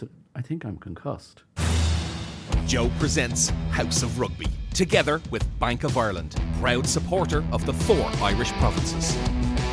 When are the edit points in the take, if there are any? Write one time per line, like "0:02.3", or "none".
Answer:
0:01.4